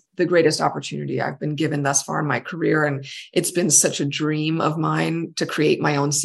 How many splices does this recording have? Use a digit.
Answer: 0